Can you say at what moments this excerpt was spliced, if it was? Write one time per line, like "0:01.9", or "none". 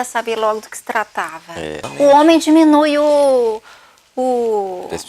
0:01.8